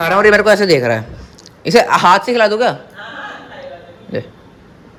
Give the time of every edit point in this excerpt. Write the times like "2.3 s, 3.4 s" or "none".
none